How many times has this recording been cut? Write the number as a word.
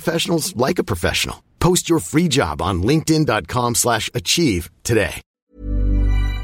one